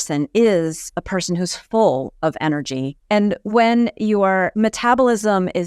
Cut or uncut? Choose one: cut